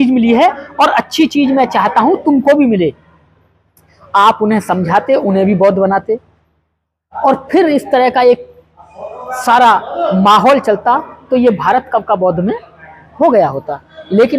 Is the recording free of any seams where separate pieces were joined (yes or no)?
yes